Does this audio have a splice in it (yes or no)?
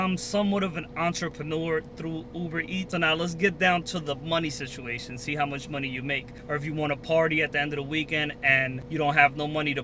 yes